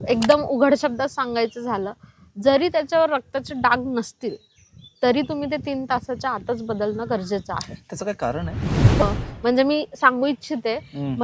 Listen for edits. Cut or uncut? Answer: cut